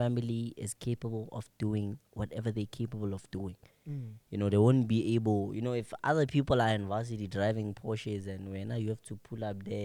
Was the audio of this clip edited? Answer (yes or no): no